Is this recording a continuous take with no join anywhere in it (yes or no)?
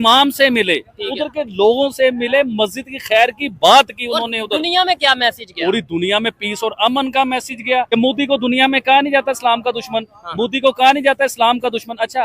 no